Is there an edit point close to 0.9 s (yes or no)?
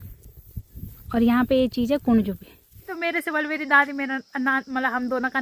no